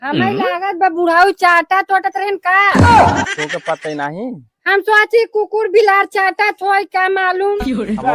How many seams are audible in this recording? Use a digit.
2